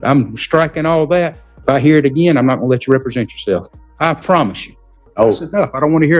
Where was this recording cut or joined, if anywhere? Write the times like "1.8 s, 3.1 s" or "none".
1.5 s, 3.8 s, 4.9 s